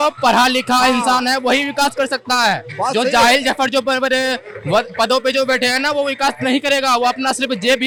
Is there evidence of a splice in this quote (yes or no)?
no